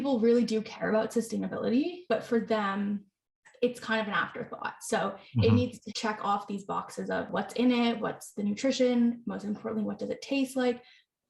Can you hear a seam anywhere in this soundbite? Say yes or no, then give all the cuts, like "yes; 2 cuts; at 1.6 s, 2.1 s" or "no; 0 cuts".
yes; 4 cuts; at 2.0 s, 5.8 s, 7.3 s, 8.1 s